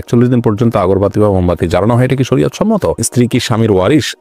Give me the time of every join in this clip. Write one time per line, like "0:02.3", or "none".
0:03.0

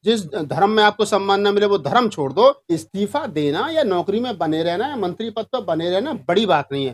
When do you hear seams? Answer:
0:02.6

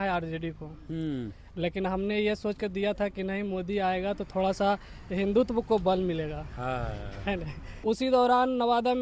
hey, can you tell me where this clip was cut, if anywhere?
0:07.8

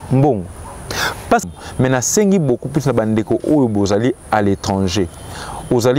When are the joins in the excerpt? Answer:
0:01.4

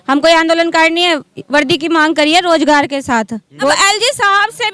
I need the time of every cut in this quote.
0:03.7

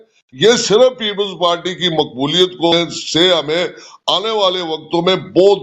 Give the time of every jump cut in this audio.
0:02.7

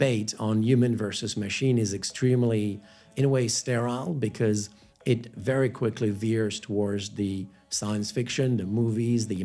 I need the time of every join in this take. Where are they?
none

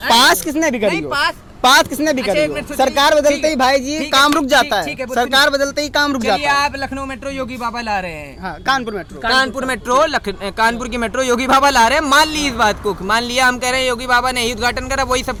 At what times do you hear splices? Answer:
none

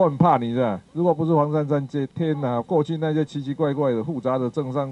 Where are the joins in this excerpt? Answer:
0:01.0

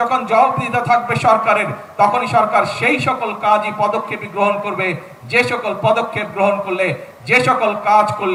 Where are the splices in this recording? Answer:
none

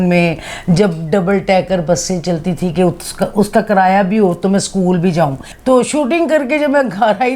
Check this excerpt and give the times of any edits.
0:05.5

